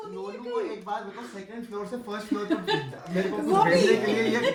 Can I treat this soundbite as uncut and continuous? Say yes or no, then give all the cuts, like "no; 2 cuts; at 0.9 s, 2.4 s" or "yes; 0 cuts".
yes; 0 cuts